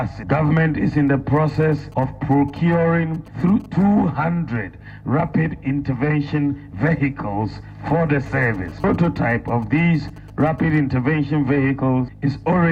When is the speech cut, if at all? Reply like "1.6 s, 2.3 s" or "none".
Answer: none